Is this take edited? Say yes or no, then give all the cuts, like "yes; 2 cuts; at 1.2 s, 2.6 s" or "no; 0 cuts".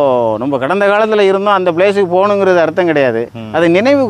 no; 0 cuts